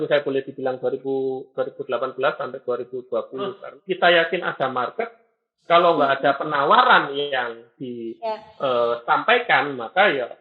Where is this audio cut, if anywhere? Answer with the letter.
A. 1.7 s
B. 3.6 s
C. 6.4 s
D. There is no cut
B